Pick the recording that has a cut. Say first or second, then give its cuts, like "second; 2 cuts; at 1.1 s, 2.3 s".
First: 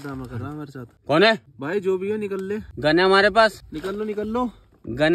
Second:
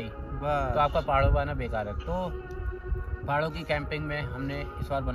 first; 4 cuts; at 0.9 s, 1.5 s, 2.7 s, 3.7 s